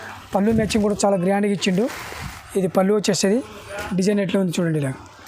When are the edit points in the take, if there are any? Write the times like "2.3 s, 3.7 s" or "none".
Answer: 3.3 s